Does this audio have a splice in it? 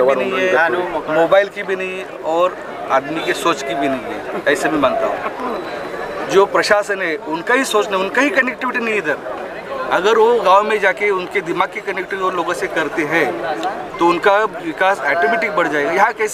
no; 0 cuts

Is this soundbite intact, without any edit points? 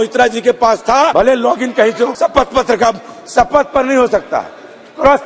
no; 2 cuts; at 1.1 s, 2.1 s

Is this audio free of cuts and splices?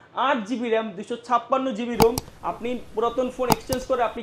no; 1 cut; at 2.3 s

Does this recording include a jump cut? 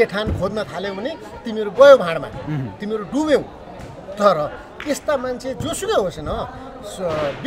no; 0 cuts

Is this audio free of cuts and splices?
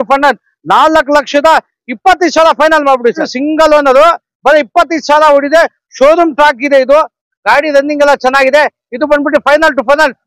no; 1 cut; at 3.2 s

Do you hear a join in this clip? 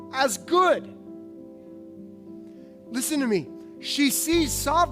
yes; 2 cuts; at 1.5 s, 2.8 s

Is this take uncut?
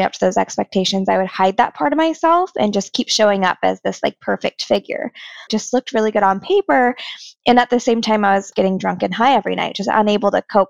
no; 2 cuts; at 5.5 s, 8.5 s

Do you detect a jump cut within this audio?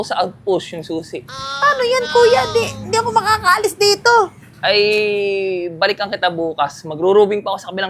no; 0 cuts

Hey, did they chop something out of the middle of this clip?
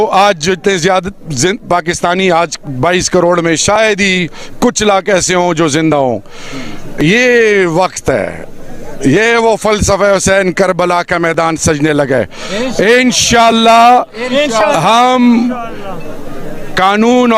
no; 0 cuts

